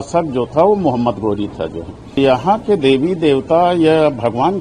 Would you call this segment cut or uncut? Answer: cut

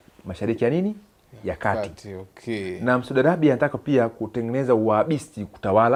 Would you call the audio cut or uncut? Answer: uncut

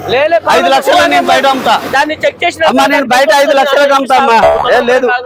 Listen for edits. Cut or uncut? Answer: uncut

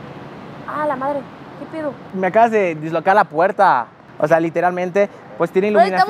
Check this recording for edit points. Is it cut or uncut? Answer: uncut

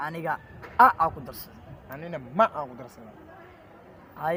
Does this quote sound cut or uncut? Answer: uncut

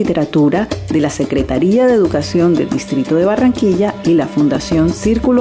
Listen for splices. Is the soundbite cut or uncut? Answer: uncut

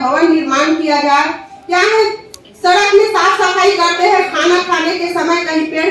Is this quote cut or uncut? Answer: uncut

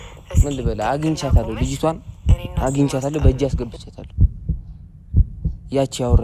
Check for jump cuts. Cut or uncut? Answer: uncut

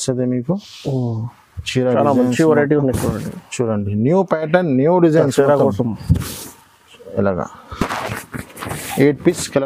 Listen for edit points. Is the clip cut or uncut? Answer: uncut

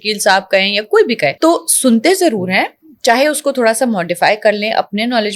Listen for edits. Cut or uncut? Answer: cut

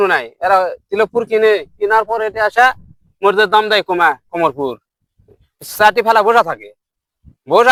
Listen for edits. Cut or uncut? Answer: uncut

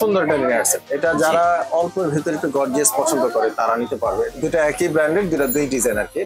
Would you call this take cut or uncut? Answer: cut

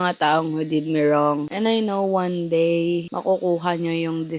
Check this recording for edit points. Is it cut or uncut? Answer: uncut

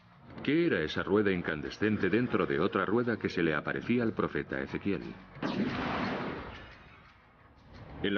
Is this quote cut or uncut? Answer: cut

